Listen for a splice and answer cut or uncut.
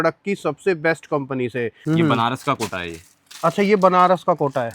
cut